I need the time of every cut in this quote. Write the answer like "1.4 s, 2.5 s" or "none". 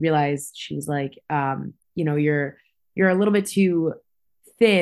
none